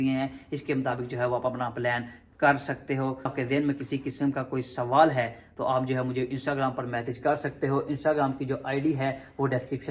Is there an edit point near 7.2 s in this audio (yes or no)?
no